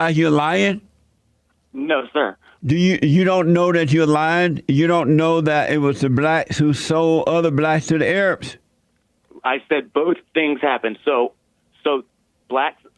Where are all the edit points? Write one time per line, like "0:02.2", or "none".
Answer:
0:02.5